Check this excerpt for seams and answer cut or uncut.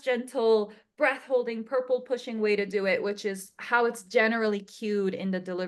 uncut